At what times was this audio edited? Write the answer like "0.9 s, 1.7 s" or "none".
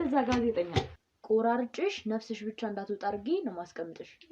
1.0 s